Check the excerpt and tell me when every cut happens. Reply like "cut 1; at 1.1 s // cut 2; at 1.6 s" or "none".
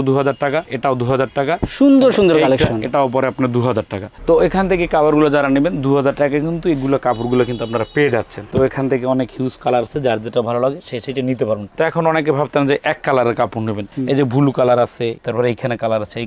none